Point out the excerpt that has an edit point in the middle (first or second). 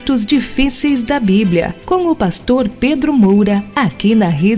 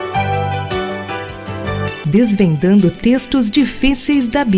first